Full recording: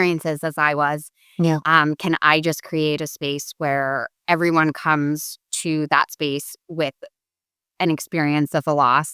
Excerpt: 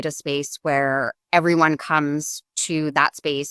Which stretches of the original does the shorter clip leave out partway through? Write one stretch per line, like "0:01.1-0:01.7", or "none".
none